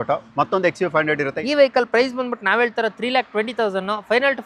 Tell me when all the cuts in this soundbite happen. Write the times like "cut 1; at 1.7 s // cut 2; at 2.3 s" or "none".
cut 1; at 1.3 s